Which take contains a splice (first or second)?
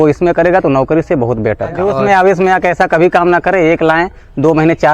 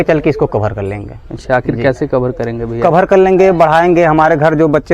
first